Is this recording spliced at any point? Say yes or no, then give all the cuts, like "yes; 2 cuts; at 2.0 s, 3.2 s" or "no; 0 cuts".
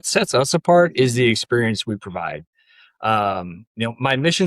no; 0 cuts